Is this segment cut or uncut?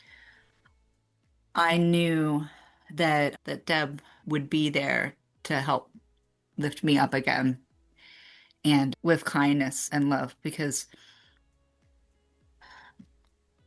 uncut